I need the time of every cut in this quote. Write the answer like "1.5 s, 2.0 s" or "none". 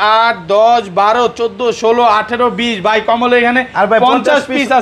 none